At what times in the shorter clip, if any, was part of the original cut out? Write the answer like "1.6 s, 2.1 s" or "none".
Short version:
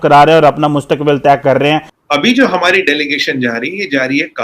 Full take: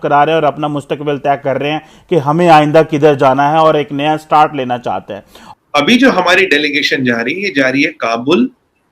1.9 s